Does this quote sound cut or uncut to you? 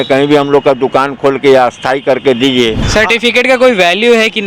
cut